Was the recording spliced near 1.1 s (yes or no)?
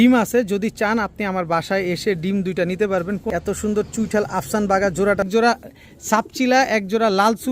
no